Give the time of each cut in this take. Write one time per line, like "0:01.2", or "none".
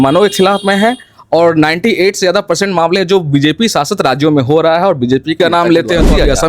0:05.4